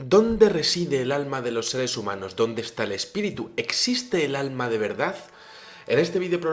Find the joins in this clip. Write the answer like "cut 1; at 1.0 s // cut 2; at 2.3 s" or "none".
none